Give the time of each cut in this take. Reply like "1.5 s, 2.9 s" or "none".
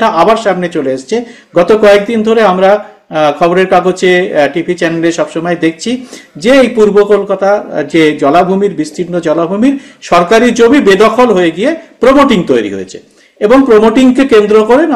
none